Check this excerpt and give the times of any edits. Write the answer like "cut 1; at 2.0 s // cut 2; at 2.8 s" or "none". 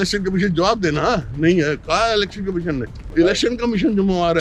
cut 1; at 3.0 s